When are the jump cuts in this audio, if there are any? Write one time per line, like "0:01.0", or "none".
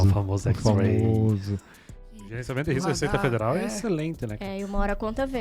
0:02.0